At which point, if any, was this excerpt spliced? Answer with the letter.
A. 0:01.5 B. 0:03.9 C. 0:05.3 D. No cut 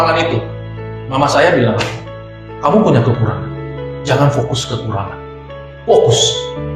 D